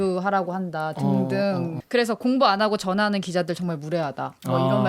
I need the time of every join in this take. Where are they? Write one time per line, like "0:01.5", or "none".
0:01.7